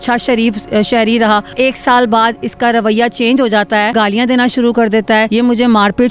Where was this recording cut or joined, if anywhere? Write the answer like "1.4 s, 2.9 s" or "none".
1.5 s, 3.9 s, 5.3 s